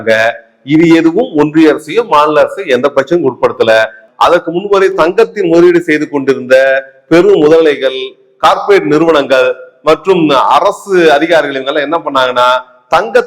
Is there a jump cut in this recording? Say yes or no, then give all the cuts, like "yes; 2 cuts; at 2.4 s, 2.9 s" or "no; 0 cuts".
yes; 1 cut; at 4.0 s